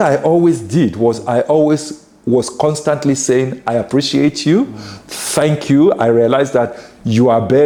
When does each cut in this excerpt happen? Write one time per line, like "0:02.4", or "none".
none